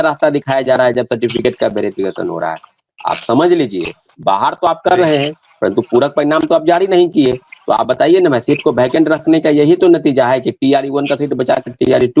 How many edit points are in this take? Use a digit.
0